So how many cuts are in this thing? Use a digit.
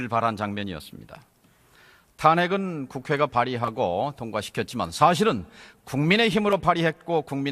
1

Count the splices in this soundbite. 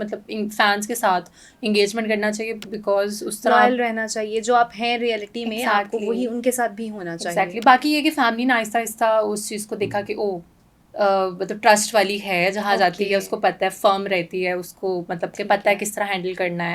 0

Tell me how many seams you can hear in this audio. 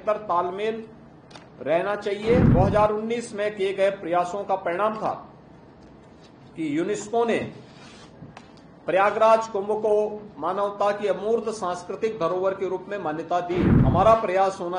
2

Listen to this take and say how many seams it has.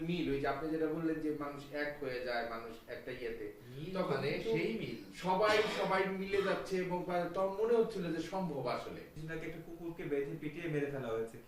1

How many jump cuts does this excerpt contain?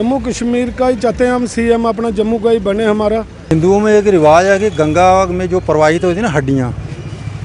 1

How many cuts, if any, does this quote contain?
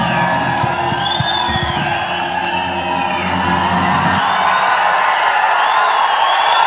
0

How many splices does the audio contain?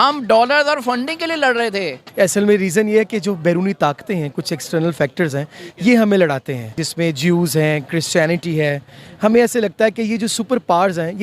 2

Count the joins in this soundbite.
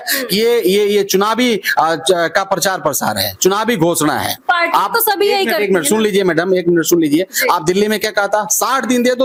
0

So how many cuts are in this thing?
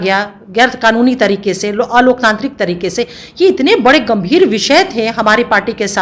0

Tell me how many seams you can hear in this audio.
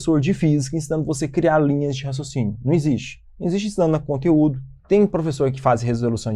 1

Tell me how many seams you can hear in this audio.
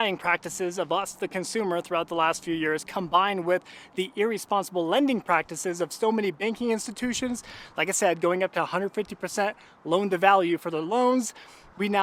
0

